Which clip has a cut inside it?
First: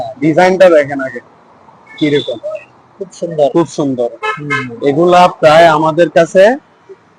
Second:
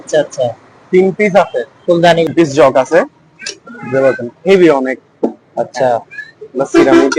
second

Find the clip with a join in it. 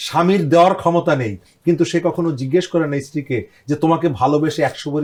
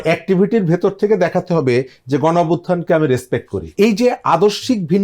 second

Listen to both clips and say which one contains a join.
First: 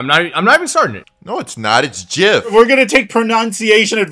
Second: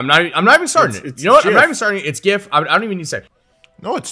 first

